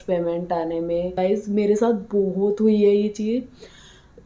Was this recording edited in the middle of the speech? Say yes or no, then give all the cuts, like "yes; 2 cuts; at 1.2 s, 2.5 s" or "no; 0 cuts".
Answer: yes; 1 cut; at 1.2 s